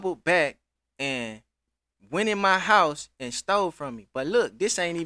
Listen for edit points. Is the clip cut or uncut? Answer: uncut